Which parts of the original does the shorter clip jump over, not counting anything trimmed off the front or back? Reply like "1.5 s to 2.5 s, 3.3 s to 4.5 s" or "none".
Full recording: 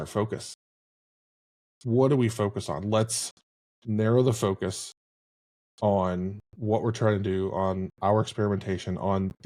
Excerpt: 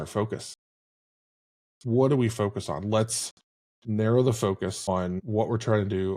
5.1 s to 6.5 s